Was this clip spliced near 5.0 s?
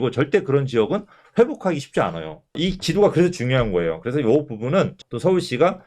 yes; 1 cut; at 5.0 s

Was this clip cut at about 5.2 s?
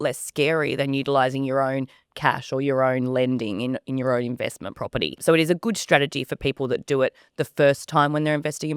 yes; 1 cut; at 5.2 s

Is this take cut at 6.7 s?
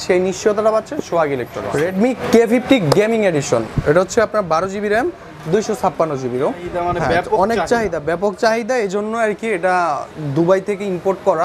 yes; 2 cuts; at 1.8 s, 6.7 s

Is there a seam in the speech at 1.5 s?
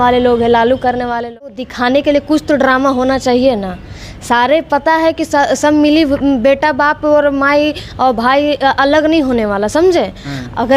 yes; 1 cut; at 1.5 s

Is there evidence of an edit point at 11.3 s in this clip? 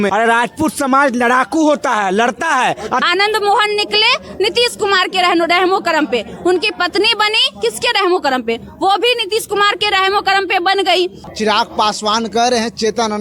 yes; 2 cuts; at 3.0 s, 11.3 s

